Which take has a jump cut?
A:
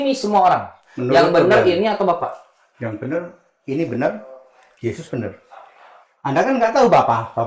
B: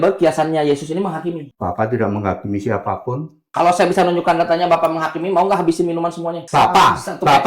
B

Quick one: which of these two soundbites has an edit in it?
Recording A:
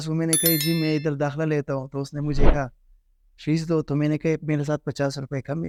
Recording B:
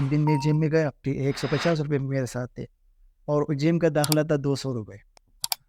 B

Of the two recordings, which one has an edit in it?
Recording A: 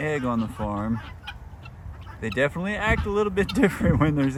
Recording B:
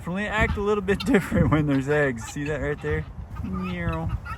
B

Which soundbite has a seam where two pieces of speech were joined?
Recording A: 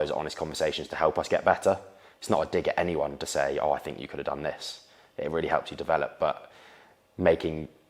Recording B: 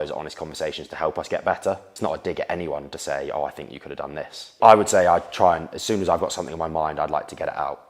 B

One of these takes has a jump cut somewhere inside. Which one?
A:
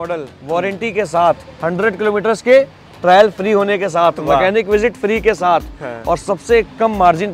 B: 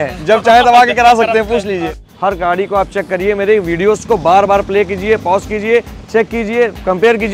B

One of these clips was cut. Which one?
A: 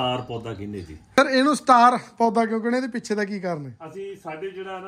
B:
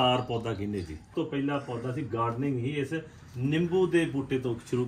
B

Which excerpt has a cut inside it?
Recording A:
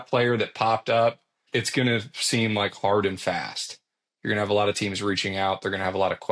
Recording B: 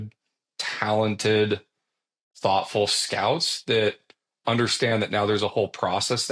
A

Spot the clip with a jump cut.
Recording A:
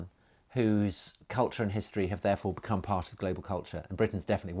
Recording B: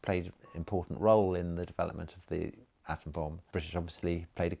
B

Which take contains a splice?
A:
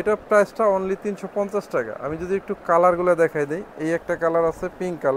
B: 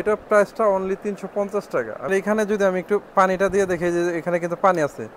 B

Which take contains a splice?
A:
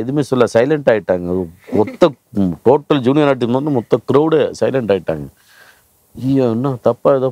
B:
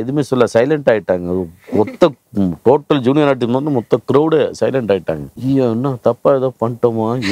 B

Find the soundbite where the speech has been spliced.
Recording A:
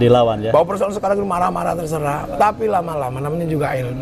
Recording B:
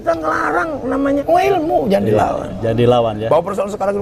B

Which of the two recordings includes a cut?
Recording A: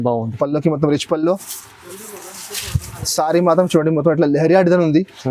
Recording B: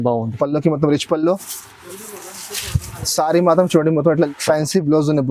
B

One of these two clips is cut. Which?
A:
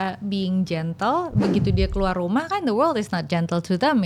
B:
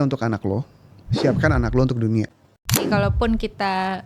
B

